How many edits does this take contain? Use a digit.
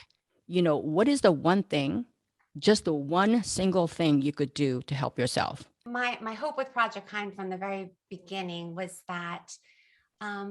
1